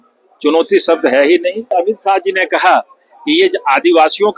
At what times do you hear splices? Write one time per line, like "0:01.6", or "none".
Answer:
0:01.7

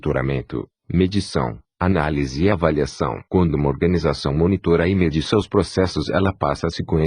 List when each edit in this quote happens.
0:02.6

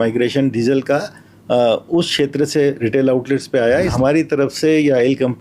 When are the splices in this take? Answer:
0:03.9

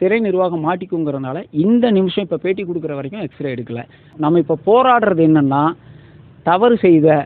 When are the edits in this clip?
0:04.0

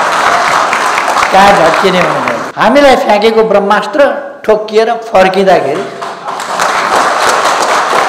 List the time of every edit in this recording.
0:02.4

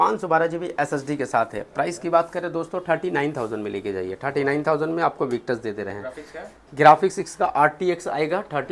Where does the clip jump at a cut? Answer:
none

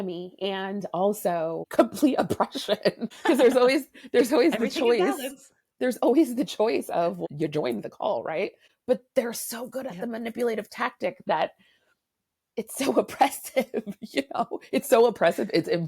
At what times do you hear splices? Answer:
0:01.7
0:03.1
0:07.2
0:08.7

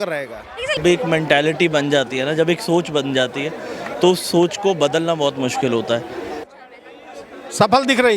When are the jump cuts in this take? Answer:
0:00.8
0:06.5

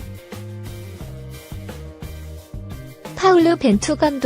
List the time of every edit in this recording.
0:03.2

